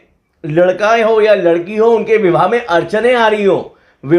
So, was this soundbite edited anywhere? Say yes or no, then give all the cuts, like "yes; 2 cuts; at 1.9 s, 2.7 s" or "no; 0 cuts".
no; 0 cuts